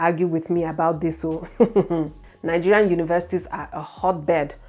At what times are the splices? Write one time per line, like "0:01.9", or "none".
none